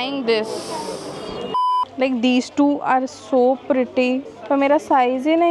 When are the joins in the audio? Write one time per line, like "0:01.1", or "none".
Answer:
0:01.9
0:04.3